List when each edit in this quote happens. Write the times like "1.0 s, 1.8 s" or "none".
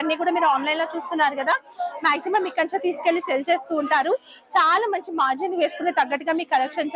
none